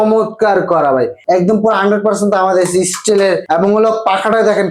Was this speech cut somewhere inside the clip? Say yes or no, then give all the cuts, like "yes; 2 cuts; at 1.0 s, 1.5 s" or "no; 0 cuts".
yes; 2 cuts; at 1.2 s, 3.4 s